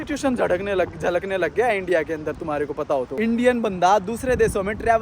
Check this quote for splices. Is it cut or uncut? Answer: cut